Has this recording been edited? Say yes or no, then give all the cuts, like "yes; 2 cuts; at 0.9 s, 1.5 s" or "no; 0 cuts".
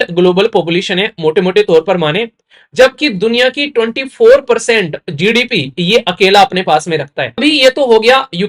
yes; 1 cut; at 7.4 s